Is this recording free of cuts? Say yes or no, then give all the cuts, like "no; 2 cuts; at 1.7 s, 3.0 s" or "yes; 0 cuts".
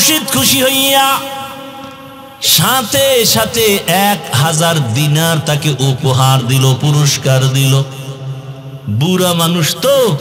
yes; 0 cuts